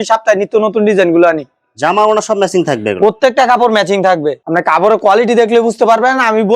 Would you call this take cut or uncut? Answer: uncut